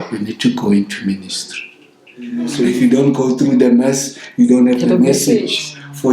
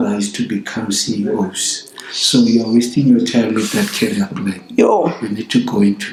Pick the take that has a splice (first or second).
first